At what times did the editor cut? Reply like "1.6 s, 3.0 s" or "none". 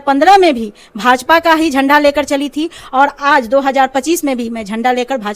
none